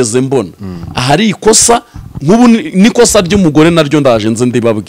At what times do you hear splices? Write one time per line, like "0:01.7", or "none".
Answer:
none